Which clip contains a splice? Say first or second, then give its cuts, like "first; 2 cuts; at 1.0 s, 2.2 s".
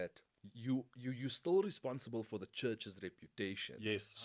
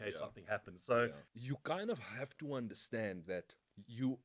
second; 1 cut; at 1.3 s